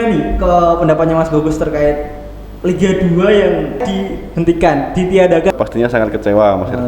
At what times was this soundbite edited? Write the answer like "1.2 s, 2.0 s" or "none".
3.8 s, 5.5 s